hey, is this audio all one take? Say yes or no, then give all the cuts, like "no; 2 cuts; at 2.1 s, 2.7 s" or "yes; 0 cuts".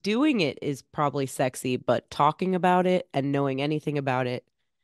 yes; 0 cuts